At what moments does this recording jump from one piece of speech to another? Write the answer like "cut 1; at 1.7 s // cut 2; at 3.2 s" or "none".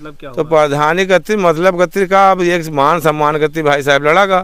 none